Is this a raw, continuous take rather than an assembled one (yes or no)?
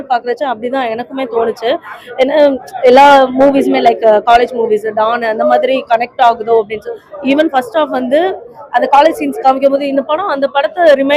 yes